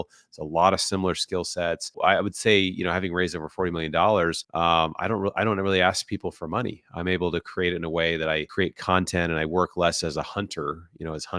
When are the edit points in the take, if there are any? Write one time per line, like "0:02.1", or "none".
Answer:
0:01.9
0:04.4
0:08.5